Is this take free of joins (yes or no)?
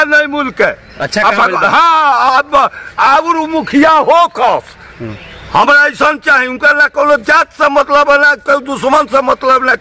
yes